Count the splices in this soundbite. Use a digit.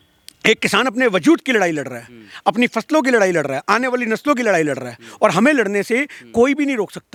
0